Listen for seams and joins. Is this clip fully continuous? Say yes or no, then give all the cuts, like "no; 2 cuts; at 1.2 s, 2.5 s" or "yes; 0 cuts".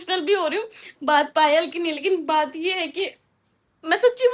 yes; 0 cuts